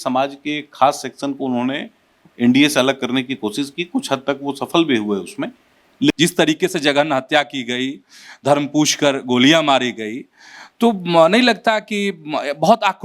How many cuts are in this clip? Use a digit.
1